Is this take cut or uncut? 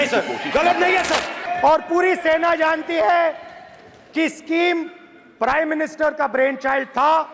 cut